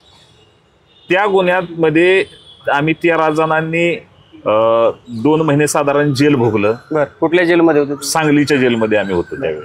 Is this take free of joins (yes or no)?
yes